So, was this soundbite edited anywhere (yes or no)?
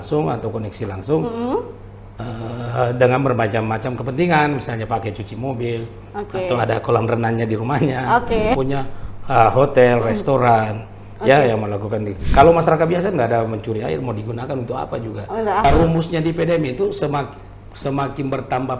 yes